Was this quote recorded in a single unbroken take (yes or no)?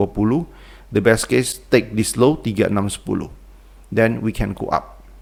yes